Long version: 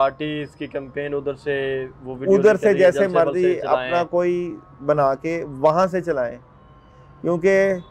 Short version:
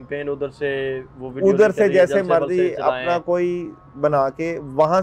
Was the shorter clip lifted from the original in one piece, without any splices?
yes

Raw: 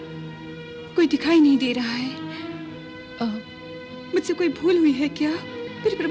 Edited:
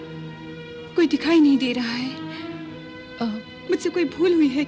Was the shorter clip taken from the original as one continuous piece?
no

